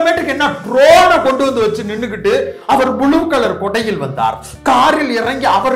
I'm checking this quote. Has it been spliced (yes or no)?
no